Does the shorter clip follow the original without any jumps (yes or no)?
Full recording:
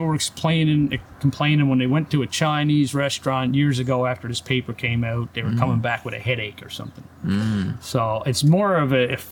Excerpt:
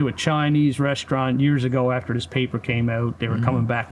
yes